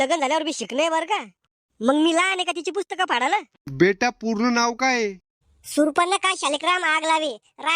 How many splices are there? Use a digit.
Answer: 1